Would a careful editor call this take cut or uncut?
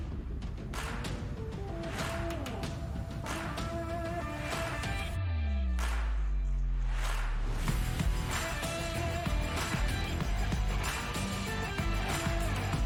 uncut